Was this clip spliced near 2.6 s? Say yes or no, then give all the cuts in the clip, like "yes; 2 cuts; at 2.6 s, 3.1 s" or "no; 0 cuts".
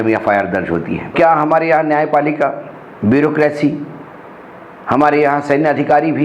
no; 1 cut; at 1.1 s